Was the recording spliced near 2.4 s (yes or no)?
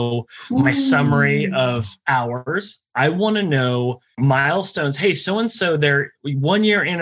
yes